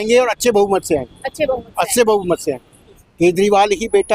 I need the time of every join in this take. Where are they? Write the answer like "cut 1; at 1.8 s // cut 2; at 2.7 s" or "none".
cut 1; at 3.0 s